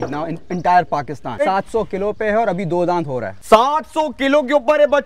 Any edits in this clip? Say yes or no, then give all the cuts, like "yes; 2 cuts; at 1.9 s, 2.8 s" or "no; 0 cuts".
yes; 2 cuts; at 1.4 s, 3.3 s